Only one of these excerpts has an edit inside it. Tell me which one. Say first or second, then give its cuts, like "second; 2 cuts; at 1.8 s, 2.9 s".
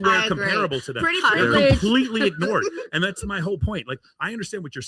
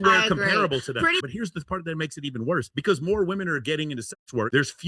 second; 1 cut; at 1.2 s